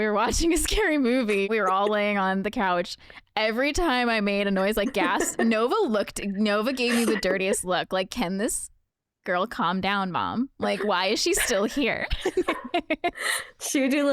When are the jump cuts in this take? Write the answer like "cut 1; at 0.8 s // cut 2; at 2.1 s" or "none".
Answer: cut 1; at 1.5 s